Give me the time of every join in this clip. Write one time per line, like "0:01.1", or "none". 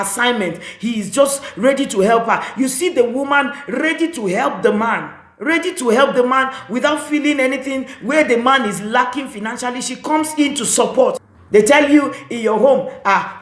0:11.3

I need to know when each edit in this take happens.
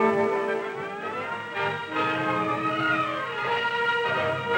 none

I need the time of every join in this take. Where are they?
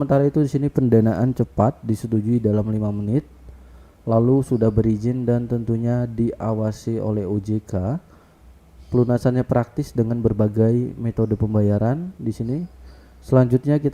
none

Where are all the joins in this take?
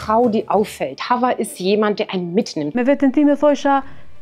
0:02.6

